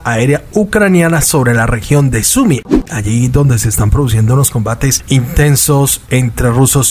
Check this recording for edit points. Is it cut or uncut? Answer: uncut